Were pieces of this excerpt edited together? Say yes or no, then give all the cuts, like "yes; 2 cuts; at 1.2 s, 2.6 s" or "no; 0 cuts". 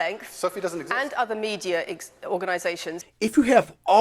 yes; 1 cut; at 3.0 s